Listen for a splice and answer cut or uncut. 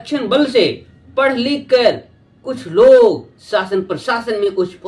uncut